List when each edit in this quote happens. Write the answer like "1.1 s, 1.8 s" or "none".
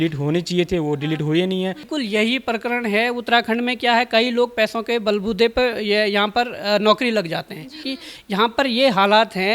1.9 s, 7.8 s